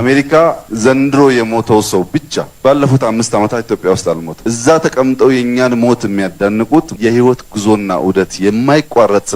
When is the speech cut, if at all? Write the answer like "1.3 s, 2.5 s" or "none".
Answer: none